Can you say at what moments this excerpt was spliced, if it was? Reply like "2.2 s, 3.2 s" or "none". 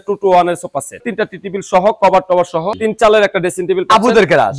1.0 s, 2.8 s